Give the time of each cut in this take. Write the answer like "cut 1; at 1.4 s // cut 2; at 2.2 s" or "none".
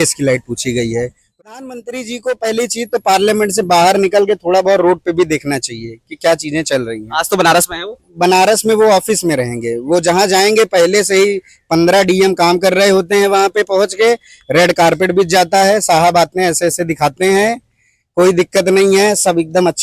cut 1; at 1.4 s